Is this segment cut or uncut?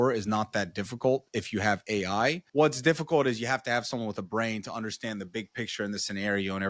cut